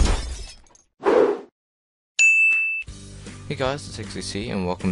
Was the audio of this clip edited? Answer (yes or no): no